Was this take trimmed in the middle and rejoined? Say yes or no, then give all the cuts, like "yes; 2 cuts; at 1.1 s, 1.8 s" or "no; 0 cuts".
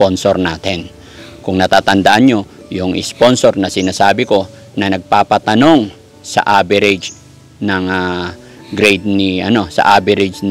no; 0 cuts